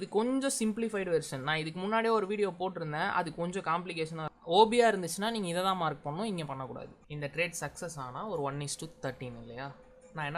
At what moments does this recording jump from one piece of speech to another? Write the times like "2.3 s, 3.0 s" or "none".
4.3 s, 7.0 s